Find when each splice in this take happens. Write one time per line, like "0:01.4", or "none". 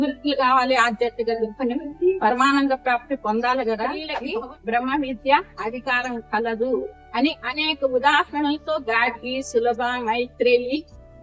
0:04.1